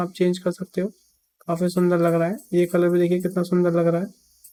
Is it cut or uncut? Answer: uncut